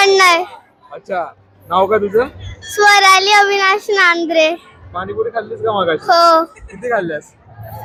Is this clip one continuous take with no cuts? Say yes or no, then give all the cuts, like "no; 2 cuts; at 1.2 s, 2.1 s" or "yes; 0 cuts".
yes; 0 cuts